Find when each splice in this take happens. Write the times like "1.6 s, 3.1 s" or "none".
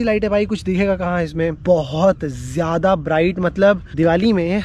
1.6 s, 3.9 s